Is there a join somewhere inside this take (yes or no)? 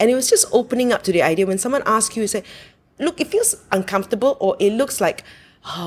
no